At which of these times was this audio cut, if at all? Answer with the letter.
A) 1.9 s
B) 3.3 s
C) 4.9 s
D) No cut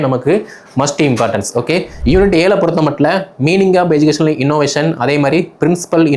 A